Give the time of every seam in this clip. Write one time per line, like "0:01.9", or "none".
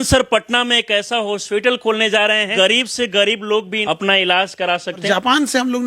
0:02.5
0:03.8
0:05.0